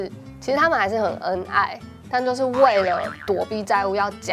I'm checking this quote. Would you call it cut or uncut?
uncut